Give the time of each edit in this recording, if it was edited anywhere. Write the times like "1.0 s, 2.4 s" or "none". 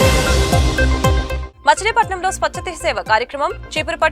1.1 s